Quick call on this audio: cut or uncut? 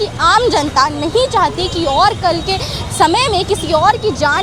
uncut